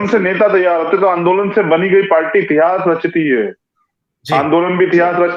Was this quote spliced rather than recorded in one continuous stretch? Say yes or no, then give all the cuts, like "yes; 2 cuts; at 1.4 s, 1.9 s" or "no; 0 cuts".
no; 0 cuts